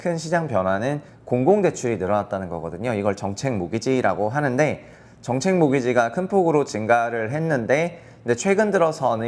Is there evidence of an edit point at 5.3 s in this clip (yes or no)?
no